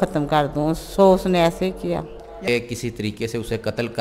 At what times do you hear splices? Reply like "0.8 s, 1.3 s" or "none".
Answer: 2.5 s